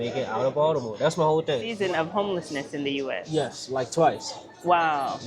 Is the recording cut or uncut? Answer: cut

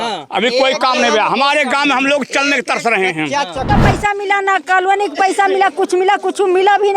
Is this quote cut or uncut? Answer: cut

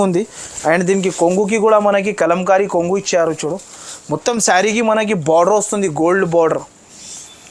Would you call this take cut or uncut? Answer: uncut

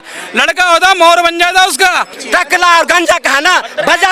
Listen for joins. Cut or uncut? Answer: cut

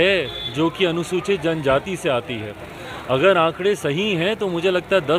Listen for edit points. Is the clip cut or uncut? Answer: uncut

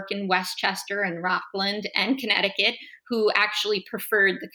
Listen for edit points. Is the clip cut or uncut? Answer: uncut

